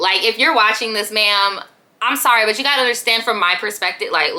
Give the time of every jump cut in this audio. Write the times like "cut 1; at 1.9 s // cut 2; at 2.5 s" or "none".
none